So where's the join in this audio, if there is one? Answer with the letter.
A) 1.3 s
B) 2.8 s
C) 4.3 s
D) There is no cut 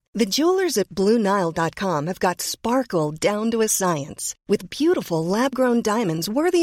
D